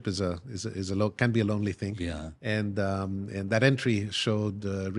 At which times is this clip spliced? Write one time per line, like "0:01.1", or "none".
none